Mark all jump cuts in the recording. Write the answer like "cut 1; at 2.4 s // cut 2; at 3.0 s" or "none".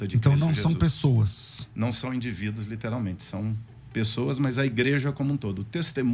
none